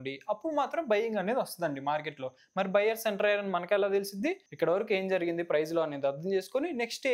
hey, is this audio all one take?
no; 1 cut; at 4.4 s

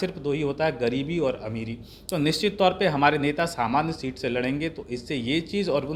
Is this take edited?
no; 0 cuts

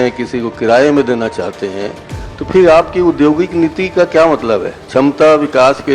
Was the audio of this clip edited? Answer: no; 0 cuts

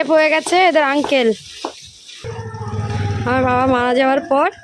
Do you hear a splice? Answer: yes; 1 cut; at 2.2 s

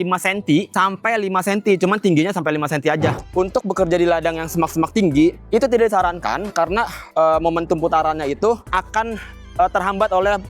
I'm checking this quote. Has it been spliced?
yes; 1 cut; at 3.2 s

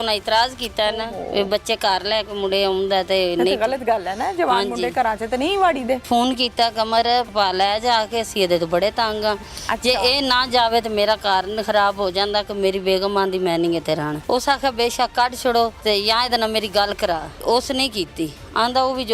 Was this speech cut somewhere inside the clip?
yes; 5 cuts; at 6.0 s, 7.3 s, 14.1 s, 15.8 s, 17.4 s

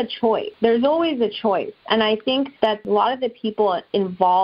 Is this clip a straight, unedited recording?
no; 1 cut; at 2.8 s

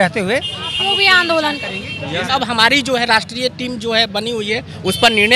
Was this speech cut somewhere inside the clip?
yes; 1 cut; at 2.3 s

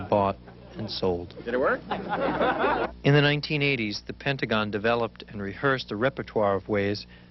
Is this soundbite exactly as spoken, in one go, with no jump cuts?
yes; 0 cuts

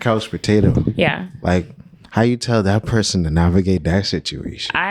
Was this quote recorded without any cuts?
yes; 0 cuts

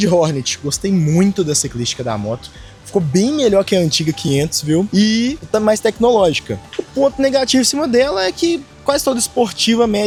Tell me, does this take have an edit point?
no; 0 cuts

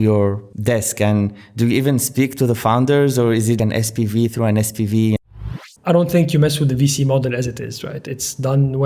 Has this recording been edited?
yes; 1 cut; at 5.2 s

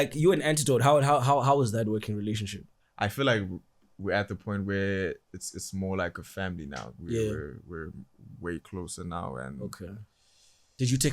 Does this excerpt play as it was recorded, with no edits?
yes; 0 cuts

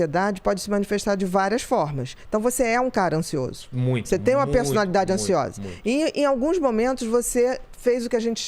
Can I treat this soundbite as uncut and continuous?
yes; 0 cuts

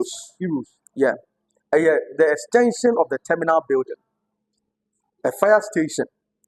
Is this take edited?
no; 0 cuts

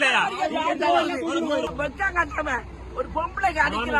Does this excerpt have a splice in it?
yes; 1 cut; at 1.7 s

